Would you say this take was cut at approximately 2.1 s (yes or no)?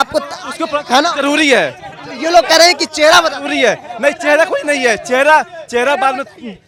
no